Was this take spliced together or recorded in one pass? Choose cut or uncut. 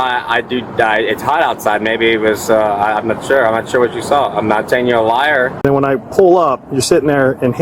cut